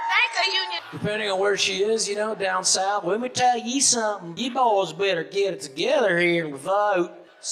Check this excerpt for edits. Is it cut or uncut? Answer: uncut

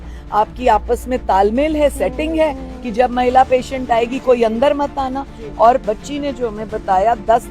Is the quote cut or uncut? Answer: uncut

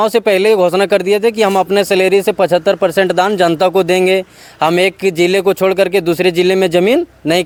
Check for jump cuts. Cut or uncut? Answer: uncut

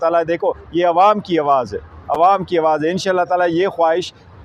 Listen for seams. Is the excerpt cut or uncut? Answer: uncut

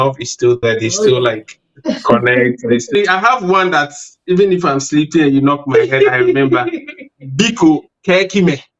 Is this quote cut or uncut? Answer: cut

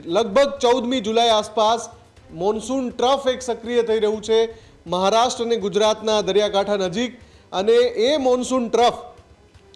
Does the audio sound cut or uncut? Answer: uncut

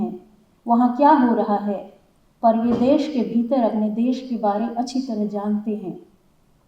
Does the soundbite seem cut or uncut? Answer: uncut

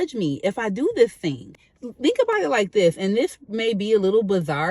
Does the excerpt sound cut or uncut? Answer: uncut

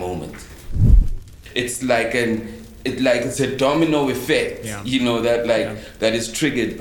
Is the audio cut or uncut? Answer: cut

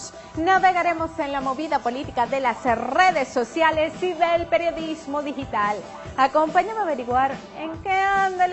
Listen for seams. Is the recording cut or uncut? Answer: uncut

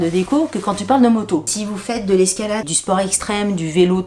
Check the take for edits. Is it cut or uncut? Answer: cut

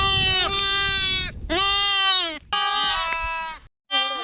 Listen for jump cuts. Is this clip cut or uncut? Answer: uncut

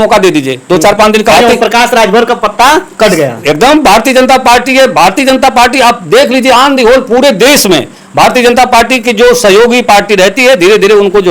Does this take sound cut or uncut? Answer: cut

